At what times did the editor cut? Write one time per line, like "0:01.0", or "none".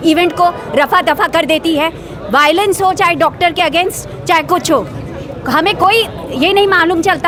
none